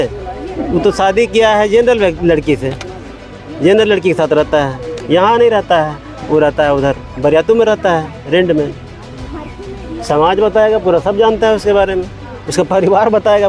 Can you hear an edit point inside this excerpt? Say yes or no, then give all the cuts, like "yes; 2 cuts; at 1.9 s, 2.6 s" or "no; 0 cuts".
no; 0 cuts